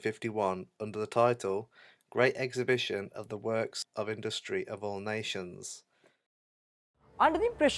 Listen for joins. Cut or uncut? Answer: uncut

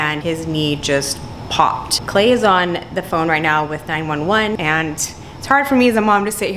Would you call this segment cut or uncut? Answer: cut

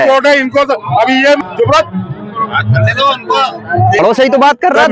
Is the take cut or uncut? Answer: cut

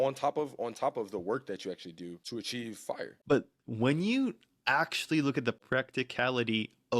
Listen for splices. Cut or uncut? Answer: cut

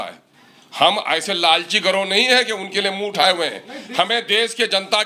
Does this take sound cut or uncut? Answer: uncut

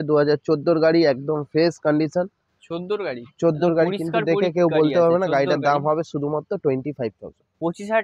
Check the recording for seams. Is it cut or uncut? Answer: uncut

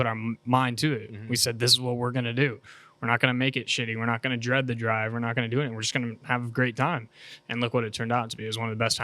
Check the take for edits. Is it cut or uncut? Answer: uncut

